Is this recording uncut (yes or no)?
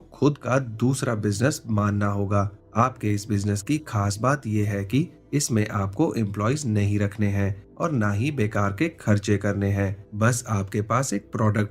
yes